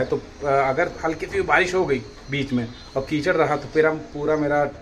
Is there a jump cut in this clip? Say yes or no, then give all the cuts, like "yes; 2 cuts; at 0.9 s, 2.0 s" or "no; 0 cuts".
no; 0 cuts